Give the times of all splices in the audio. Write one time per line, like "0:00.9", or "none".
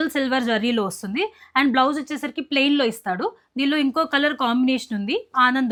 none